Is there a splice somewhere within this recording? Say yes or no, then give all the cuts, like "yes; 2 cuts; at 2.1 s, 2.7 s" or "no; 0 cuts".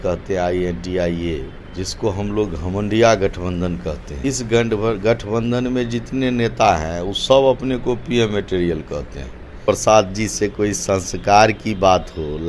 yes; 3 cuts; at 1.6 s, 4.1 s, 9.6 s